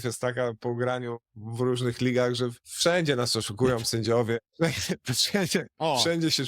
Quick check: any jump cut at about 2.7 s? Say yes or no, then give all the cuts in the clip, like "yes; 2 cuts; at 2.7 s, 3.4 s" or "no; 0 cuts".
yes; 1 cut; at 2.7 s